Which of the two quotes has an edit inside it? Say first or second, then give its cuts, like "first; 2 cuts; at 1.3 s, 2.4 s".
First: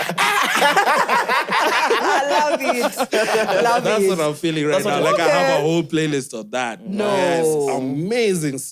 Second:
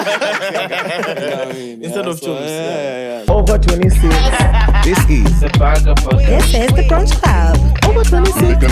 second; 1 cut; at 3.2 s